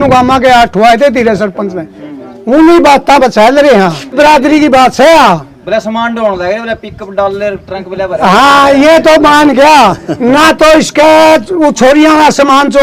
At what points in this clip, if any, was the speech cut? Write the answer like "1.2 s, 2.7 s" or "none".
4.1 s